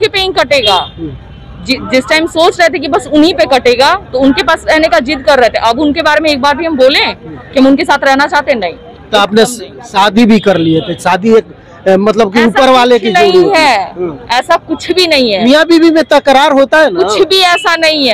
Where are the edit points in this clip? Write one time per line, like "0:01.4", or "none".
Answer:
none